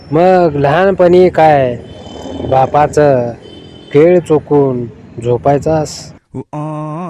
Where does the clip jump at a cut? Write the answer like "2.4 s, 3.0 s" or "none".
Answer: 6.2 s